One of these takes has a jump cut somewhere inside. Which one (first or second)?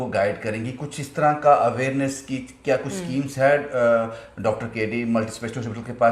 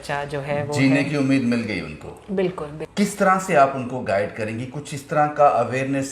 second